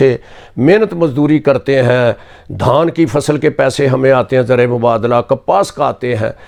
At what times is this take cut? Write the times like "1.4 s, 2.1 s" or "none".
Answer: none